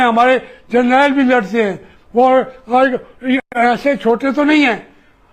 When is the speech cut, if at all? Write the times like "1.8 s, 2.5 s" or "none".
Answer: none